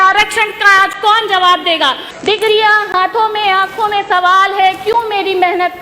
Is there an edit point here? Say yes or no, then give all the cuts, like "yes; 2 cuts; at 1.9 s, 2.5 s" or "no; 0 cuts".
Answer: yes; 1 cut; at 2.1 s